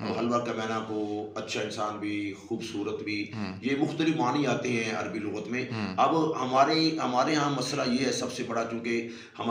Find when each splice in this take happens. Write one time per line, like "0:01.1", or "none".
none